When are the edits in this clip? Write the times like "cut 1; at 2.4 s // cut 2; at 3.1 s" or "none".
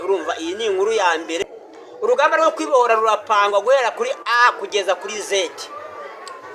cut 1; at 1.4 s